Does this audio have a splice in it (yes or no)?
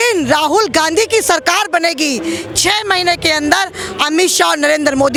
no